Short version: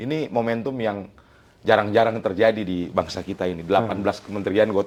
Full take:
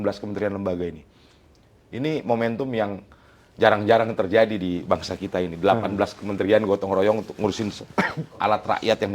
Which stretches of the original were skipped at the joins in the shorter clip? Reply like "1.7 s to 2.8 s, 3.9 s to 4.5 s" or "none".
none